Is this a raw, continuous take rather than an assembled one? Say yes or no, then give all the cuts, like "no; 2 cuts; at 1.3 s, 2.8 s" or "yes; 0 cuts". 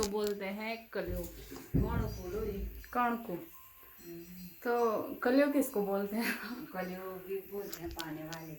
yes; 0 cuts